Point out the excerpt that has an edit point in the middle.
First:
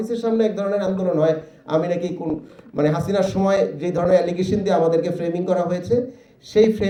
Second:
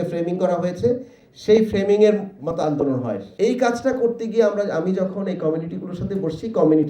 second; 1 cut; at 3.2 s

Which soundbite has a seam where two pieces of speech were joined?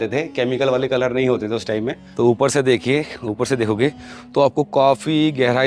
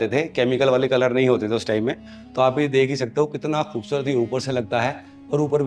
first; 1 cut; at 2.0 s

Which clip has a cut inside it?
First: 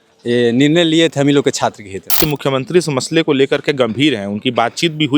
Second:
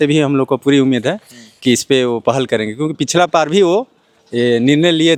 first; 1 cut; at 2.2 s

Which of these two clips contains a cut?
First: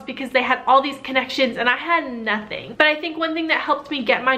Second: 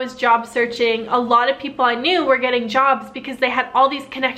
first; 1 cut; at 2.6 s

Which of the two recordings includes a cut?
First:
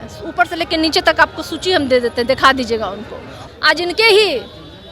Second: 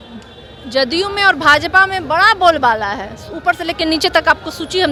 first; 1 cut; at 3.4 s

